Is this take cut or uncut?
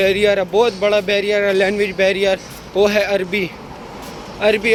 uncut